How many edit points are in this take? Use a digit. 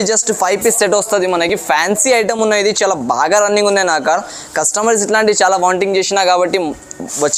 0